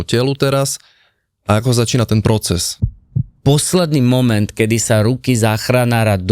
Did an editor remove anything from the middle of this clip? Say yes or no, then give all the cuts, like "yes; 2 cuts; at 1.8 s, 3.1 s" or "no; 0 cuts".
yes; 1 cut; at 2.8 s